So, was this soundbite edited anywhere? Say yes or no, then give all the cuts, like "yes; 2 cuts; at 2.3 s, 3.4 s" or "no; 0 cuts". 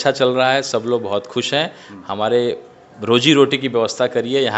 no; 0 cuts